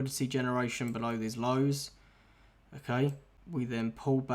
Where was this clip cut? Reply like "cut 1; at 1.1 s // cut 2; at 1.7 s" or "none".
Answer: cut 1; at 3.3 s